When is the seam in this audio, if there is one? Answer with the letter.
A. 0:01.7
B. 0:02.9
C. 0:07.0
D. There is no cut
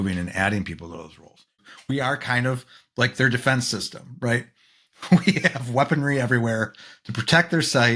A